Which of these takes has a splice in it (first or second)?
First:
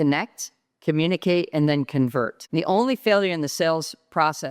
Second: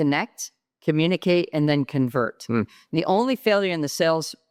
first